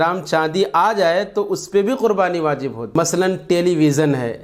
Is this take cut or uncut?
cut